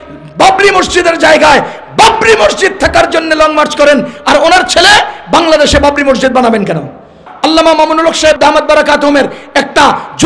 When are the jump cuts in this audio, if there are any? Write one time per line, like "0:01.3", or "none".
0:07.2